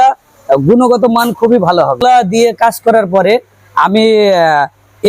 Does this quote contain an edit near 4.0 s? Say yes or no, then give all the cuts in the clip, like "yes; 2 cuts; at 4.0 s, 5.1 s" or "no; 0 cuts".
no; 1 cut; at 2.0 s